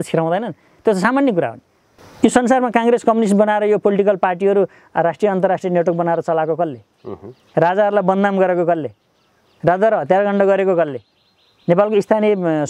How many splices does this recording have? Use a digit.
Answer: 0